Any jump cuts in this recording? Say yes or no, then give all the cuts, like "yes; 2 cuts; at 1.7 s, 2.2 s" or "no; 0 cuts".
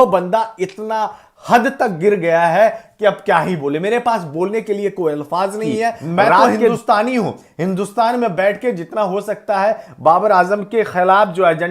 yes; 1 cut; at 6.7 s